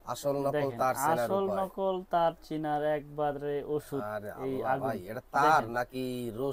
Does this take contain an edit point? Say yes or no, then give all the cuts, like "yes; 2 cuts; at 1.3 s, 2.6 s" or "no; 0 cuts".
no; 0 cuts